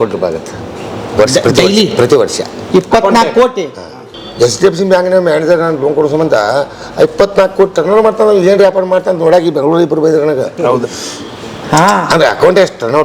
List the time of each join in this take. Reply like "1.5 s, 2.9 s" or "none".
4.1 s